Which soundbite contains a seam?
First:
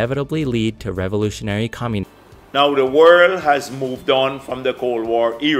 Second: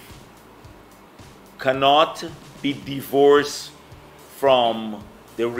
first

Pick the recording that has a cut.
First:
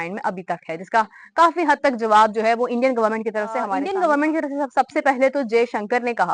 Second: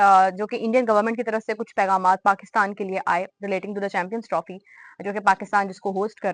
first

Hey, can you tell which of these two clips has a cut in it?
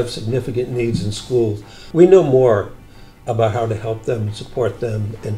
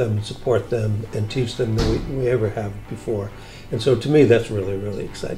first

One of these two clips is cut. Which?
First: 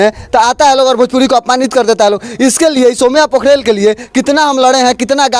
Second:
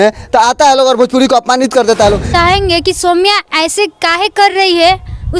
second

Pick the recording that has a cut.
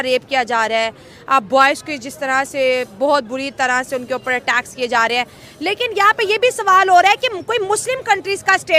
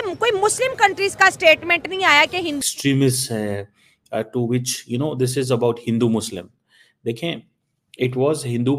second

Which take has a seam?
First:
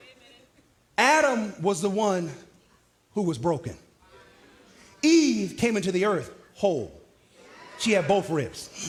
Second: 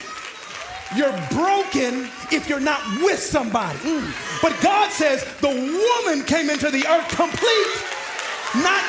second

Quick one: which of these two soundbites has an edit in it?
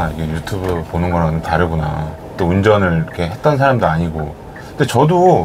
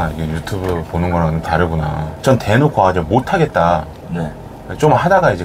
second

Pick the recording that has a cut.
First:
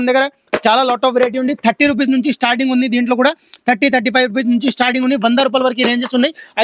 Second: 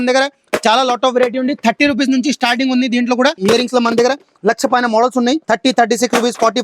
second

